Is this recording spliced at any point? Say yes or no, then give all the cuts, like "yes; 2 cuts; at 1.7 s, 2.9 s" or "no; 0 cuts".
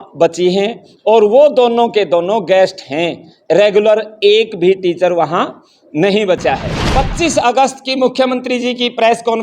yes; 1 cut; at 6.8 s